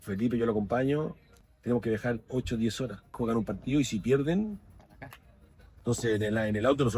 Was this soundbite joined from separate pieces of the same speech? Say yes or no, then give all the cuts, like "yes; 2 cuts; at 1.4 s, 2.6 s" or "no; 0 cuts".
yes; 3 cuts; at 1.5 s, 3.2 s, 5.7 s